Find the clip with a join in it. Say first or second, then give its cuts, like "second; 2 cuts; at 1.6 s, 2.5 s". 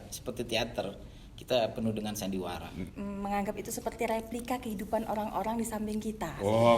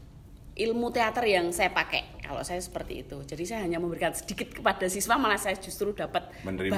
first; 1 cut; at 2.8 s